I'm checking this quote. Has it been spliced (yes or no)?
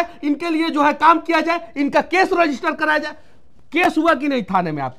no